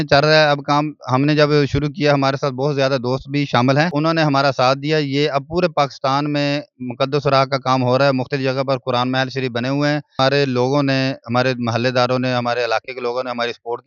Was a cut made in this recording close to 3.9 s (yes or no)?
yes